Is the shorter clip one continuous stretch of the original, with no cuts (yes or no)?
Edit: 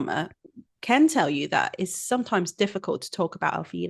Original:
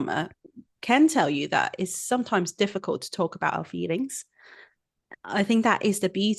yes